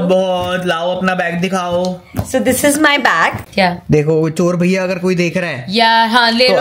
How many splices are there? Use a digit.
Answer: 1